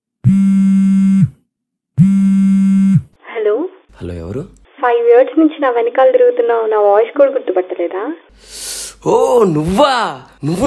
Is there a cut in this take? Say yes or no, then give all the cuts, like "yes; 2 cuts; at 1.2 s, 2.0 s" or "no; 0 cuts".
yes; 2 cuts; at 1.4 s, 3.2 s